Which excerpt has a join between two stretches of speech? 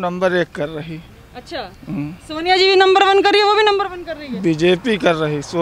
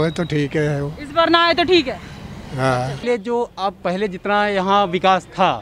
second; 1 cut; at 3.0 s

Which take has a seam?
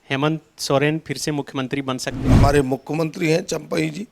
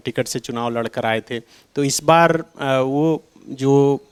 first; 1 cut; at 2.3 s

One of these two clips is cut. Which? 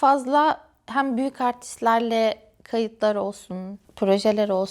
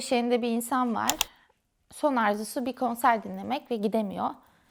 first; 1 cut; at 3.8 s

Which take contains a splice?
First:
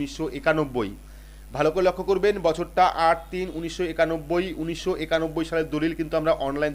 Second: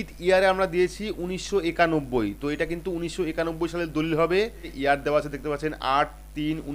second; 1 cut; at 4.7 s

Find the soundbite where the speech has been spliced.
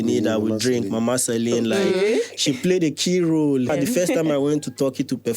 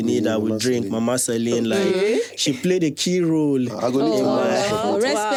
first; 1 cut; at 3.7 s

